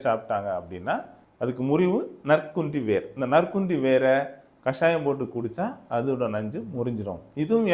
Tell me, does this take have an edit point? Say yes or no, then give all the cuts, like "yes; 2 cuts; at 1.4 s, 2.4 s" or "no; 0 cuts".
no; 0 cuts